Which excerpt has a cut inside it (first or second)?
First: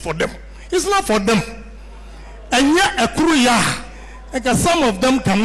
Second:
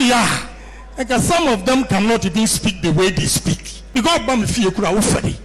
second